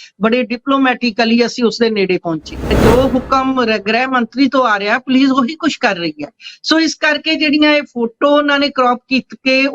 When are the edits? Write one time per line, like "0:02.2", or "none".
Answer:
0:02.7

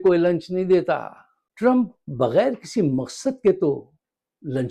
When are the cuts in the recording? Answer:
none

